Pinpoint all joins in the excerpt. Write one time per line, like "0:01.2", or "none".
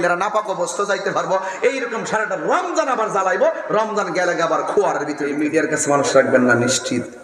0:05.4